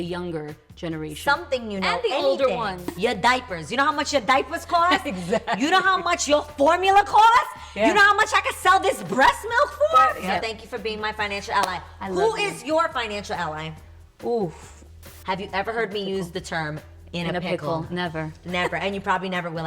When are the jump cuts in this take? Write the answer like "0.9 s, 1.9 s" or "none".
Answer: 3.0 s, 10.2 s, 15.1 s